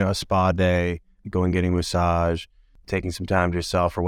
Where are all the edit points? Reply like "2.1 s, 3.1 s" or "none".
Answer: 2.7 s